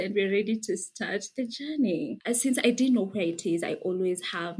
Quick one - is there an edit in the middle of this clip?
yes; 1 cut; at 2.2 s

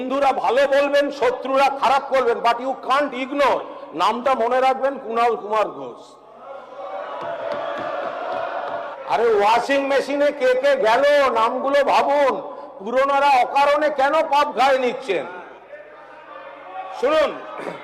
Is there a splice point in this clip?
yes; 1 cut; at 8.9 s

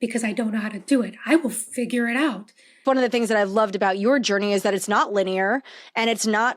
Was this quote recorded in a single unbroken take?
no; 1 cut; at 2.8 s

